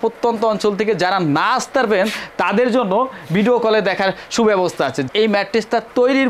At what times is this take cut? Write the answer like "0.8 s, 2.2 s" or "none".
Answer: 5.1 s